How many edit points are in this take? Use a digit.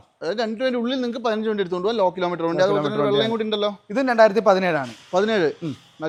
0